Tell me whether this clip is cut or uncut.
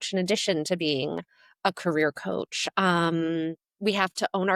uncut